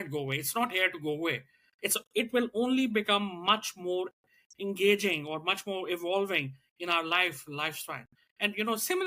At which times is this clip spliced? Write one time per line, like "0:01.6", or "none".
none